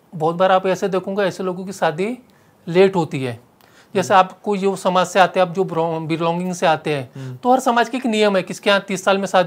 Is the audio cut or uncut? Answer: uncut